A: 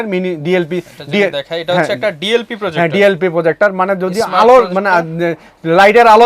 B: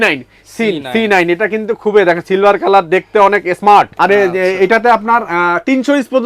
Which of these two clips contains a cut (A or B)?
B